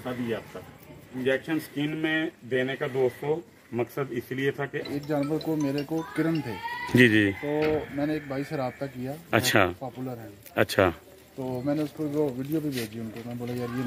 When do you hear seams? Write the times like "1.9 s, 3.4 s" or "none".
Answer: 1.1 s, 4.9 s